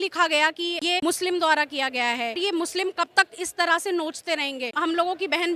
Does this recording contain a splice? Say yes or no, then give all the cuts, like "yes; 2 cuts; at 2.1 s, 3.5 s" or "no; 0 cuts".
yes; 2 cuts; at 1.0 s, 2.4 s